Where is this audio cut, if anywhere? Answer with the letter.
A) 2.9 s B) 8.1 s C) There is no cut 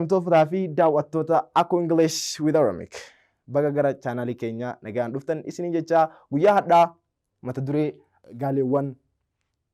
B